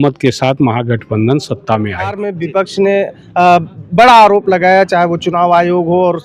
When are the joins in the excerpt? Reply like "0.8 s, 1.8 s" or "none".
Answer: 2.3 s